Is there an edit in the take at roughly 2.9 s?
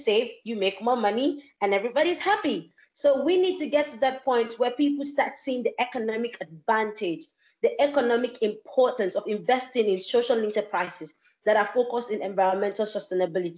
no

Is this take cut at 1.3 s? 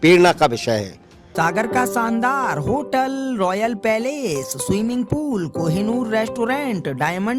yes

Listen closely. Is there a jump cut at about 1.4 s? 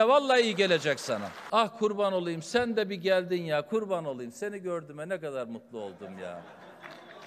yes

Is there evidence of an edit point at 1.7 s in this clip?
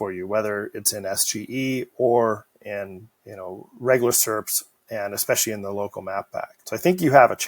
no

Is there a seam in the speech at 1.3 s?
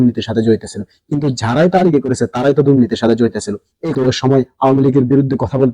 no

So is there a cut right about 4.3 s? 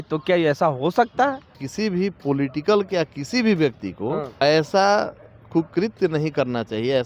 yes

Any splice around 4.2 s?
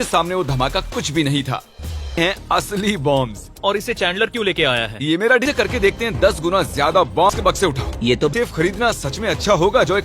no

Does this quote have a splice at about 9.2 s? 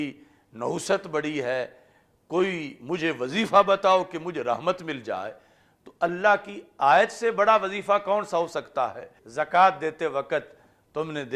yes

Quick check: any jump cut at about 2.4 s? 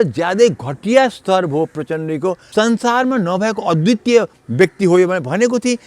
yes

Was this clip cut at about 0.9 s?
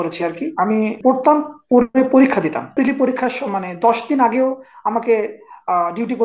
yes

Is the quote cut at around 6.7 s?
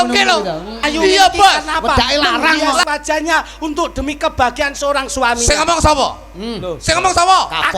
no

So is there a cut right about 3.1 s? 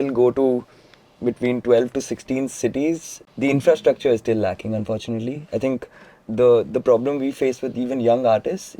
yes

